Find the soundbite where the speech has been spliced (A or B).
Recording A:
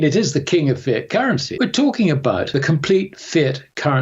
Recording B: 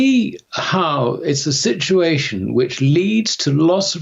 A